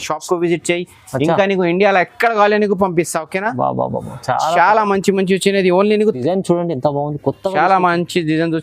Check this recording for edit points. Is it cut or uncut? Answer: cut